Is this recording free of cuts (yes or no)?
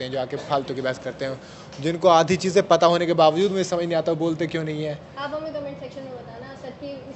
yes